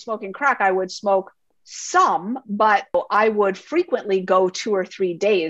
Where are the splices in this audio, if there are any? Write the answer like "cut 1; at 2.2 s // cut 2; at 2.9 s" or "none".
cut 1; at 1.5 s // cut 2; at 2.9 s